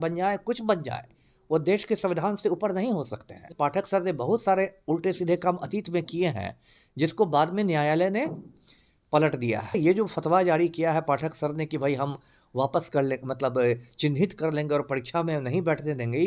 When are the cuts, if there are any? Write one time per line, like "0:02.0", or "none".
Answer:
0:03.5
0:09.6